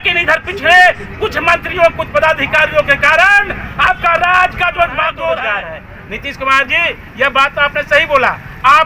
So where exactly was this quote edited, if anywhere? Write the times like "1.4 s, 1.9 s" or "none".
5.5 s

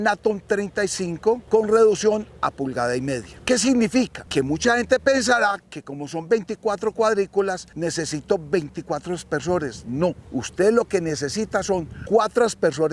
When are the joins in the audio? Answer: 1.4 s, 4.2 s, 7.7 s, 10.2 s, 11.9 s

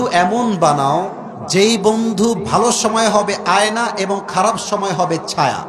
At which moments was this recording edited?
2.4 s

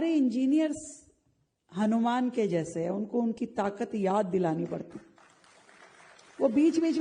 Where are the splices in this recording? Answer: none

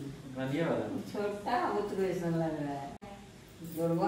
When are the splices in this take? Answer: 3.1 s

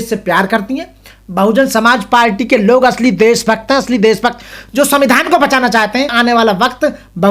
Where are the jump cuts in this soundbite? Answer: 6.1 s

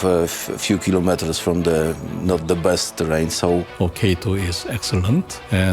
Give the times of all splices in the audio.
3.7 s

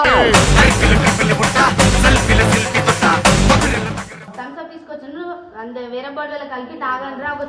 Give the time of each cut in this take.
4.2 s

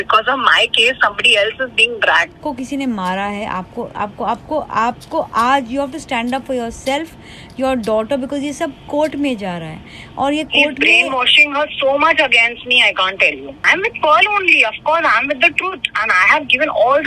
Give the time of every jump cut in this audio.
2.4 s, 13.6 s

